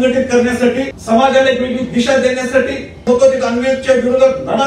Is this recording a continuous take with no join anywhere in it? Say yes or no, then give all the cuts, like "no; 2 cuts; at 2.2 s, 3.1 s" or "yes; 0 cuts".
no; 2 cuts; at 1.0 s, 3.1 s